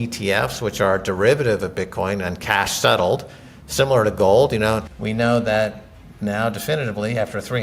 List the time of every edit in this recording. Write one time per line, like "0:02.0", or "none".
0:04.9